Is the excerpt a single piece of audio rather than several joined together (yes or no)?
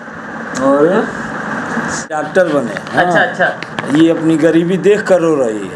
no